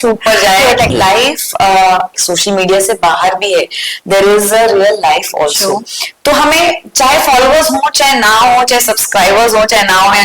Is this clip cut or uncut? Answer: cut